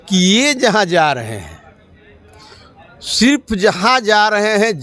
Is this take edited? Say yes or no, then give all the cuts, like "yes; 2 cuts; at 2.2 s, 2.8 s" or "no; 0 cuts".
no; 0 cuts